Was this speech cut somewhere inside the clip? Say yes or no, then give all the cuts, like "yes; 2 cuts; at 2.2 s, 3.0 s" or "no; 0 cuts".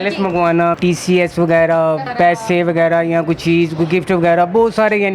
yes; 2 cuts; at 0.8 s, 2.1 s